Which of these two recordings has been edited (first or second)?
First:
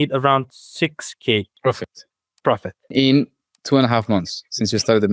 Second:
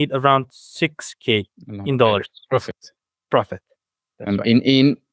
first